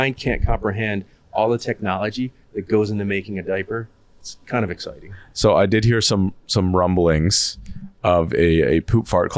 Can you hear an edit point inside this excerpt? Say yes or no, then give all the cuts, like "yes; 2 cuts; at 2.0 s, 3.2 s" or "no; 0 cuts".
no; 0 cuts